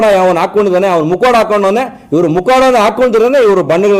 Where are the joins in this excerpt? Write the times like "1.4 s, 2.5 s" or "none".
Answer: none